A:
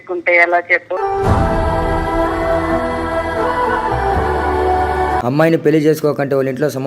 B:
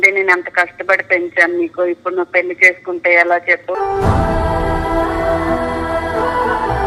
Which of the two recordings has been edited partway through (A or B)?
A